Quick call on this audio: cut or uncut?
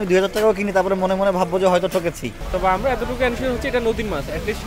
cut